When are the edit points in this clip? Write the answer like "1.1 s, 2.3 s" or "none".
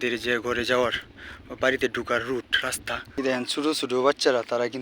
3.2 s